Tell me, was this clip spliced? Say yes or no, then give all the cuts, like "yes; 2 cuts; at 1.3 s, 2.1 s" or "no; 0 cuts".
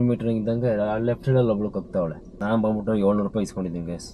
yes; 1 cut; at 2.3 s